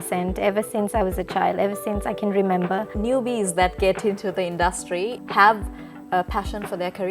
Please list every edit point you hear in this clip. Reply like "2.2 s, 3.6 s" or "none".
2.9 s, 5.2 s